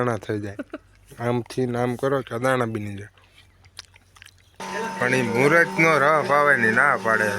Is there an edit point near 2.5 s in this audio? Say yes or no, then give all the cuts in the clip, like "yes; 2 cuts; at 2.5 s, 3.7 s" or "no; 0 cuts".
no; 1 cut; at 4.7 s